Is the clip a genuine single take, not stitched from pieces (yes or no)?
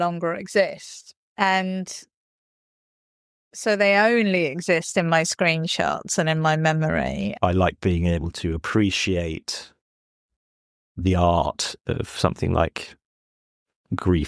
no